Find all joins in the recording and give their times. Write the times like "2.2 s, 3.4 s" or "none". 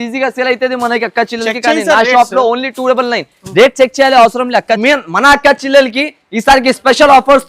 4.8 s